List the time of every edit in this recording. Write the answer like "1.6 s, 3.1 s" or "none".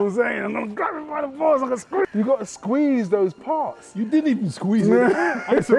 2.1 s